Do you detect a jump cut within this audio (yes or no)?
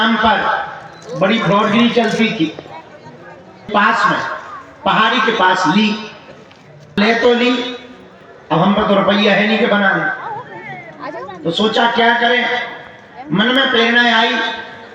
yes